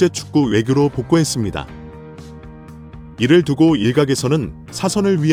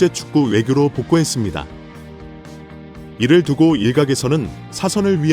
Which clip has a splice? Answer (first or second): second